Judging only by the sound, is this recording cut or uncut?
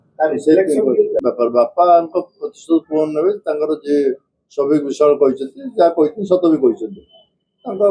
cut